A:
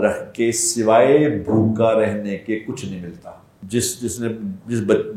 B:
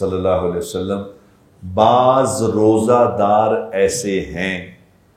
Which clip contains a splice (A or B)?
A